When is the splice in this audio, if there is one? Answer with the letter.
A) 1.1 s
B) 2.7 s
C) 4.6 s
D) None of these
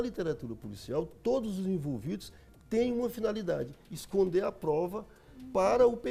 D